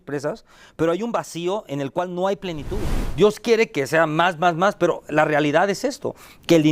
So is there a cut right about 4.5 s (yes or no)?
no